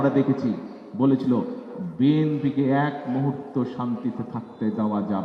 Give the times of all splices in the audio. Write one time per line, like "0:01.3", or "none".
none